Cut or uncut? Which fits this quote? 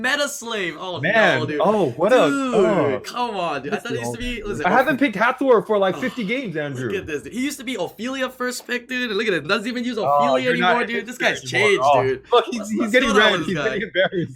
uncut